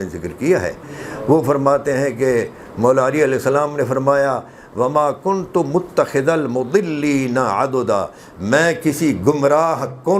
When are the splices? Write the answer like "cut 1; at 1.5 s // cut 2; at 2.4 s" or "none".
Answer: none